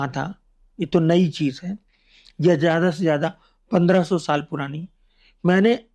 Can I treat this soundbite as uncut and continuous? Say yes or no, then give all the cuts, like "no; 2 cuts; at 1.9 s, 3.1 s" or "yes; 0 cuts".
yes; 0 cuts